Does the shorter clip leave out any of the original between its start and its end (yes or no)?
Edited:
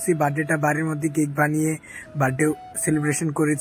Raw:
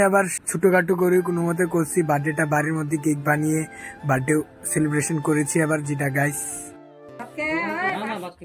no